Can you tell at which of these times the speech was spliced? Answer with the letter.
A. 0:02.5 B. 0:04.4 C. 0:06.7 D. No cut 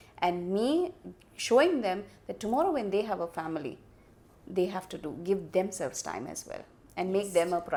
D